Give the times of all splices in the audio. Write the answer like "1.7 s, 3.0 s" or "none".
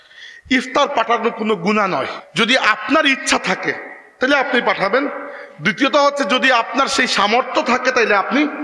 2.2 s